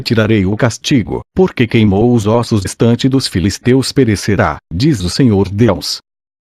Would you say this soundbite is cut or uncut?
uncut